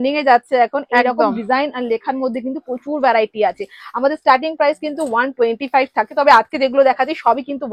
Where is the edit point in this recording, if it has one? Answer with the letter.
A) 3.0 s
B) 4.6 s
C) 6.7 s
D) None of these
D